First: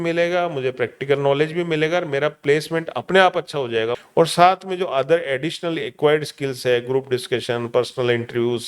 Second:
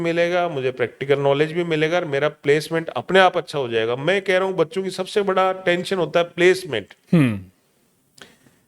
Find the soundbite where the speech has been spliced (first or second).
first